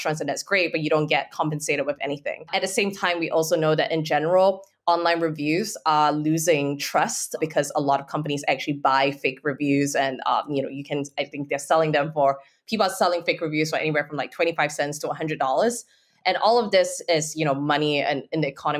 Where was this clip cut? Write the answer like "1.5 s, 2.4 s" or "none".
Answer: 2.5 s, 7.4 s